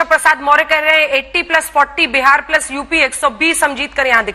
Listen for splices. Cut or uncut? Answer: uncut